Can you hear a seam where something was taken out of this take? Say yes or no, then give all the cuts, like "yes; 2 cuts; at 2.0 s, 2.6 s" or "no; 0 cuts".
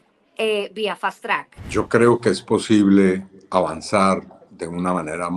yes; 1 cut; at 1.6 s